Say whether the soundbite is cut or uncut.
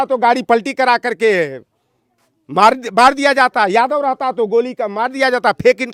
uncut